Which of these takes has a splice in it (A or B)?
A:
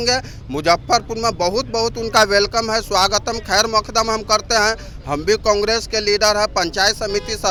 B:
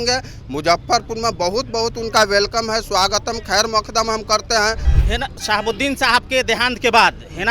B